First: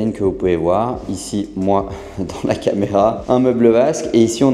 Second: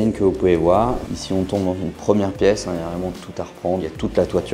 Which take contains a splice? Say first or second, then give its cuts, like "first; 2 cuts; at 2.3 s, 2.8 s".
second; 2 cuts; at 1.0 s, 3.8 s